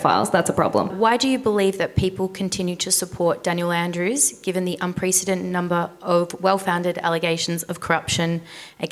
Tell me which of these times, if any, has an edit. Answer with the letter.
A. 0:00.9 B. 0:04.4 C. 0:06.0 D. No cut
A